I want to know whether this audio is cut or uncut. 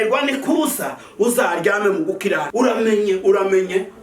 cut